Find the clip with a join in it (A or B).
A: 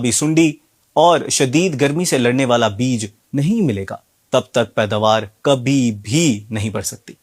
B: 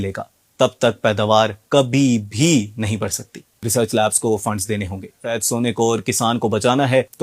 B